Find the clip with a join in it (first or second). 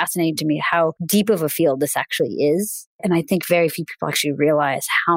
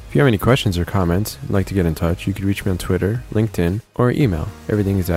first